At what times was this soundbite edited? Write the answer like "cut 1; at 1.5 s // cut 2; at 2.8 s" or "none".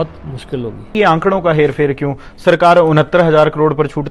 cut 1; at 0.9 s